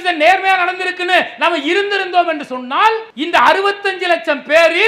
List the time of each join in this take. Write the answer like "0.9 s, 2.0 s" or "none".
3.1 s